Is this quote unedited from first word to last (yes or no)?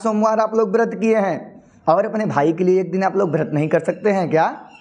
yes